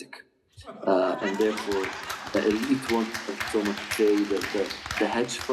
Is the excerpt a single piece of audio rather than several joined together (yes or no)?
yes